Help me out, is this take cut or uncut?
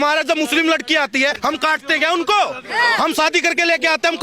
cut